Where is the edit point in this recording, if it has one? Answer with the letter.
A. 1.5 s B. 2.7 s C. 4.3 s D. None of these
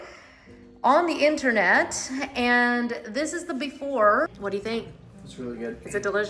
C